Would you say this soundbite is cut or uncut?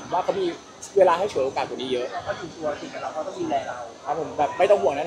uncut